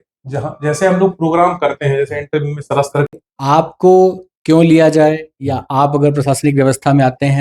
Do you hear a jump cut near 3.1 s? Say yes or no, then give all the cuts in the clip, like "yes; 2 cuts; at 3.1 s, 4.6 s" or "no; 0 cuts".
yes; 1 cut; at 3.1 s